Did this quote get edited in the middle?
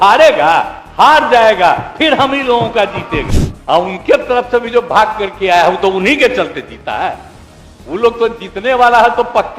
yes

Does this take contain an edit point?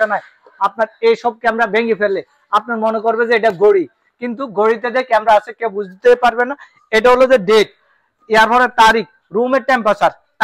no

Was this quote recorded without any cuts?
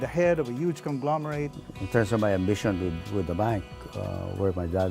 no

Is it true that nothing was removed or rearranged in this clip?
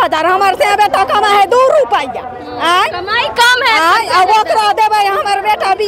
yes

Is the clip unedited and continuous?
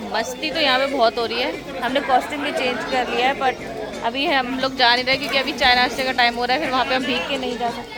yes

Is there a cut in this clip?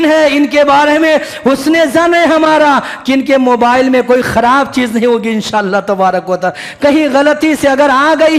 no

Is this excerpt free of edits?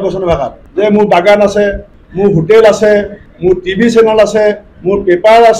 no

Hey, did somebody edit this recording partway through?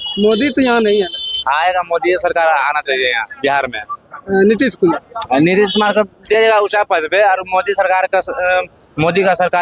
no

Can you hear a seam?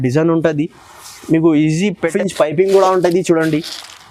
yes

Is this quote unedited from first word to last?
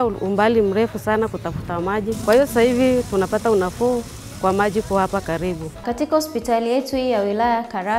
no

